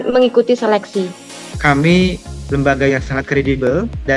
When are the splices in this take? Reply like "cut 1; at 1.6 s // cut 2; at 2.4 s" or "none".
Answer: cut 1; at 1.5 s